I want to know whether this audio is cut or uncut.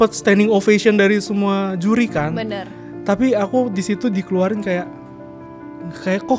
uncut